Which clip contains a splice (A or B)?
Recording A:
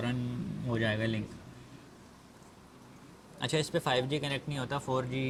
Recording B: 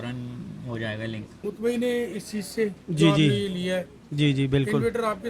B